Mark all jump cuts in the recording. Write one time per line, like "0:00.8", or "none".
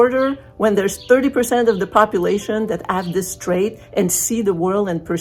none